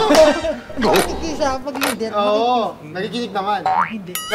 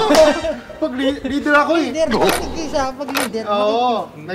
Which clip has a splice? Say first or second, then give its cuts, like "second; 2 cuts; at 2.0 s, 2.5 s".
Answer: first; 1 cut; at 1.0 s